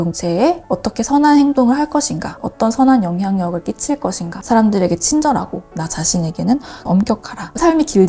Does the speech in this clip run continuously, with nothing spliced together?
no; 1 cut; at 4.4 s

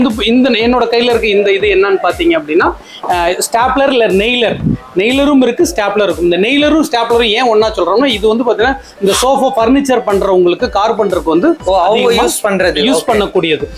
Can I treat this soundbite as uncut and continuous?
yes; 0 cuts

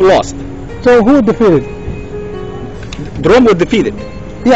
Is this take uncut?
yes; 0 cuts

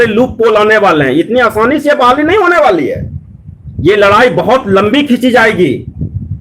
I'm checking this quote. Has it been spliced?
no; 0 cuts

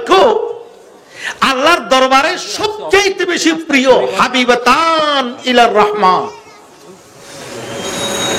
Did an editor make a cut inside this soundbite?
no; 0 cuts

